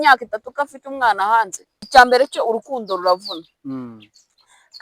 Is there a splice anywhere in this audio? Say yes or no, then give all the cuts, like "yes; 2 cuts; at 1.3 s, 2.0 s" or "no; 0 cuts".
yes; 1 cut; at 1.7 s